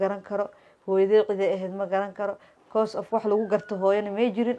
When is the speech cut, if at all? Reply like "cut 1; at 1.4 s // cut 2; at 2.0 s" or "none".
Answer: none